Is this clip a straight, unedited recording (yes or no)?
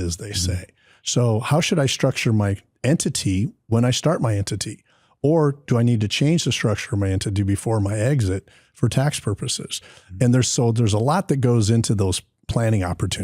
no